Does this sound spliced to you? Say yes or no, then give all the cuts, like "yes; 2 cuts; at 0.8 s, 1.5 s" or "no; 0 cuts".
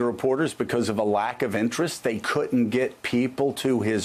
no; 0 cuts